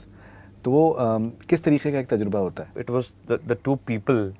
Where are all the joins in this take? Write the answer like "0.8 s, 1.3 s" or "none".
2.7 s